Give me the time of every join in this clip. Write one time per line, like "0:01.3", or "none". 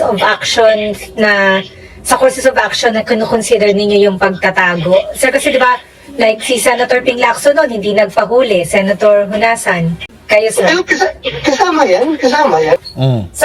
none